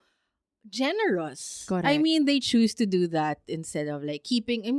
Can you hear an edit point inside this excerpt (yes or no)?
no